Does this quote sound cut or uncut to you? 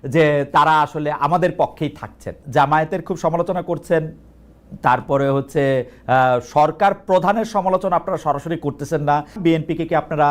cut